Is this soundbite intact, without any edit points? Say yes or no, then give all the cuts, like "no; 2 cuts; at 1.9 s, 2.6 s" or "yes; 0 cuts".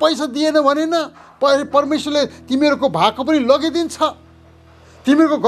yes; 0 cuts